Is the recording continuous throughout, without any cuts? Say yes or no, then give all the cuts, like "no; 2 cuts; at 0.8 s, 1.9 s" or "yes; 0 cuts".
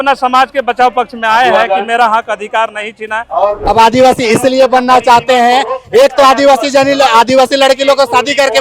no; 1 cut; at 3.6 s